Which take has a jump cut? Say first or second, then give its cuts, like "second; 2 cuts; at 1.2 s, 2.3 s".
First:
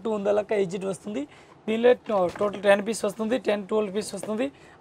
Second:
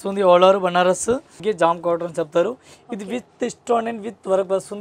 second; 1 cut; at 1.3 s